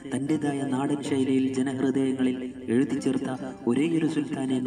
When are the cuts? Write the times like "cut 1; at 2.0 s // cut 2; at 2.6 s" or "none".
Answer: none